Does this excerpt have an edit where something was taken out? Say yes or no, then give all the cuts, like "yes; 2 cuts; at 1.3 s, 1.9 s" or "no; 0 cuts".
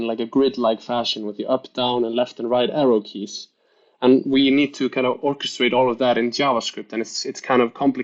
no; 0 cuts